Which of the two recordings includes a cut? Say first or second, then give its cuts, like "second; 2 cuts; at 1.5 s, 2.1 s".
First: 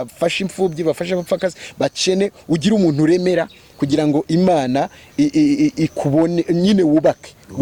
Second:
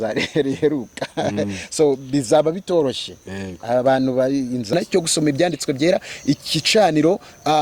second; 1 cut; at 4.7 s